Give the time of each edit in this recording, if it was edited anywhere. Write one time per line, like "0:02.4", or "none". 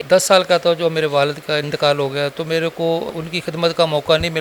0:03.1